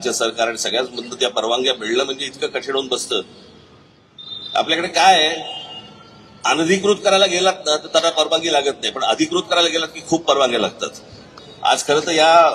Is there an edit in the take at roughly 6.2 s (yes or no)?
no